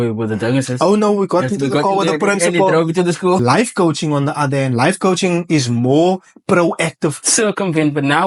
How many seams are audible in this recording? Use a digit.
2